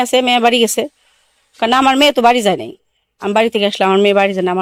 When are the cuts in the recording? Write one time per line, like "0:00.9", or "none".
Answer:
none